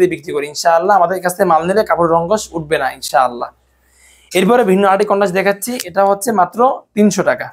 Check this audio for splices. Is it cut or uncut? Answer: uncut